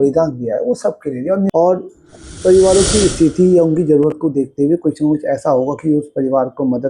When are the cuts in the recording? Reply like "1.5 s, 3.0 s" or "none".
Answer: 1.5 s